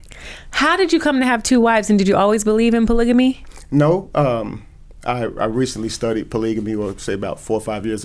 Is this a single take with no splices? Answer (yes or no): yes